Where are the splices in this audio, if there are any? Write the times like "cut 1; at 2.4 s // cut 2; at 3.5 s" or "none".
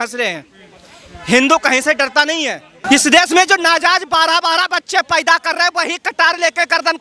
cut 1; at 2.8 s